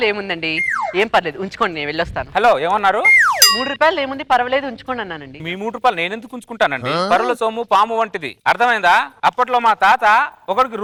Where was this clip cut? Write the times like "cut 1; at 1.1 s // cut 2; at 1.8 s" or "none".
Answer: none